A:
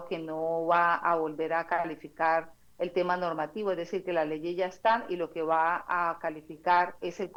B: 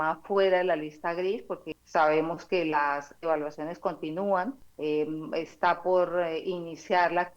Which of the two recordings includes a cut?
B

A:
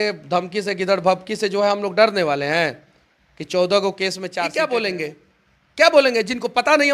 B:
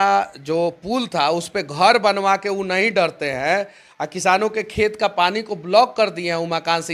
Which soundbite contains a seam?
A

